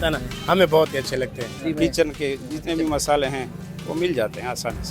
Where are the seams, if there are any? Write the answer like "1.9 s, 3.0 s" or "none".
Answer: 1.6 s